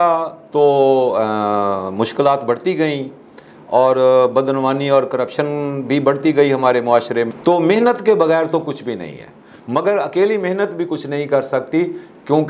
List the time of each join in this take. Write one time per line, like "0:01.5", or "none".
0:07.3